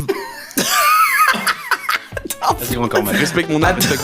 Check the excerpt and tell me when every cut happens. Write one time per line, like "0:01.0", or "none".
0:03.1